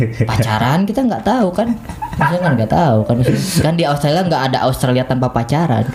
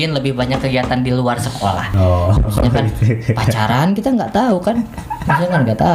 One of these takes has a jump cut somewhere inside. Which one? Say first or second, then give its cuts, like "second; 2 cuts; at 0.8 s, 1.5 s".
second; 1 cut; at 1.9 s